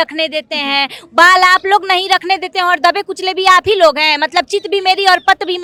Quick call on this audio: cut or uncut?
uncut